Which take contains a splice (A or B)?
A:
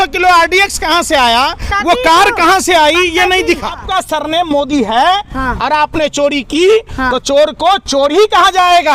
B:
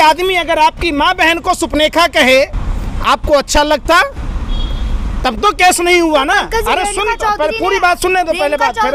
A